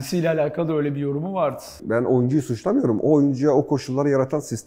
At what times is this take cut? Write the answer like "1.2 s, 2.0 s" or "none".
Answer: 1.8 s